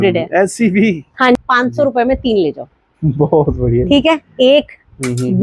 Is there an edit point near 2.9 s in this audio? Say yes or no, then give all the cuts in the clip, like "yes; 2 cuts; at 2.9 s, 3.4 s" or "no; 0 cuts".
no; 1 cut; at 1.4 s